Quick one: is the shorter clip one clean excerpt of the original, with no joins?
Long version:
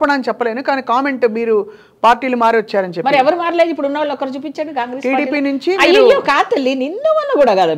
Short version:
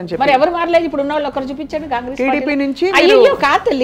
yes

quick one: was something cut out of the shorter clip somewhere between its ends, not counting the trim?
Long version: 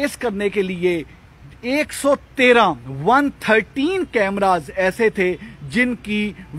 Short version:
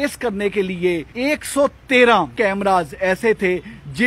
yes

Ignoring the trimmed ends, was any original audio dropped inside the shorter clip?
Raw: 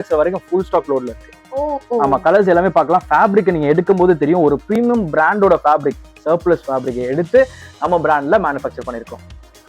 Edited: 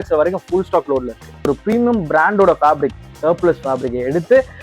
yes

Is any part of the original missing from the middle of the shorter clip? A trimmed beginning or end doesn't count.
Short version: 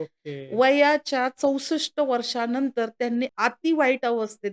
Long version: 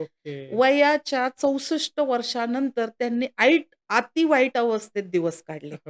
yes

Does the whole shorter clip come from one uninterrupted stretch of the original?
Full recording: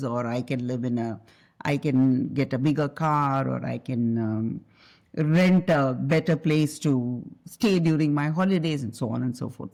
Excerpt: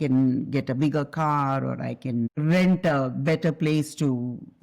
no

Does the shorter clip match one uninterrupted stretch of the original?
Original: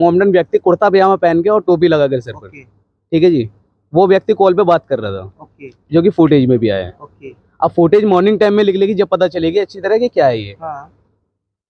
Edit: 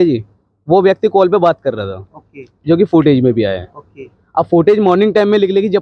yes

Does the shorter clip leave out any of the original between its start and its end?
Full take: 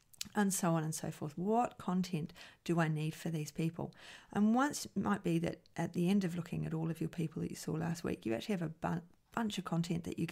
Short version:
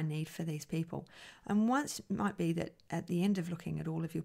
no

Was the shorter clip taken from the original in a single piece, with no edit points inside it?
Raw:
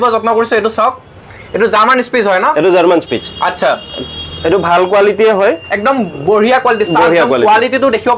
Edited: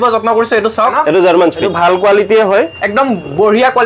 no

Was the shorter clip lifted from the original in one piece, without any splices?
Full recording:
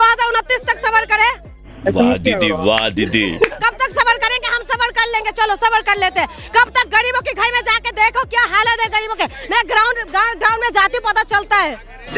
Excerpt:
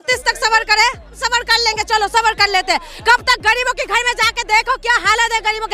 no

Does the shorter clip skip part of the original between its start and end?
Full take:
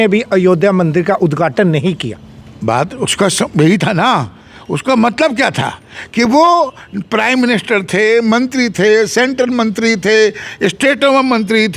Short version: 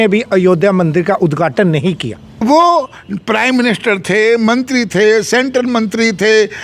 yes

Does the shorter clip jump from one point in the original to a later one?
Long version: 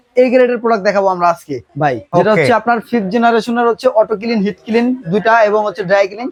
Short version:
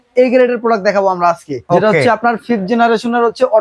yes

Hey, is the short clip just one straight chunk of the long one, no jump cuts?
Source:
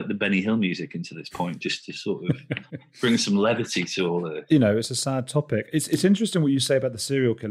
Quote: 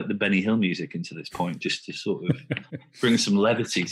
yes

